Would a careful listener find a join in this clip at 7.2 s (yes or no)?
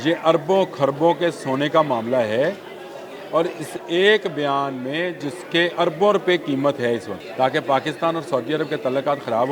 yes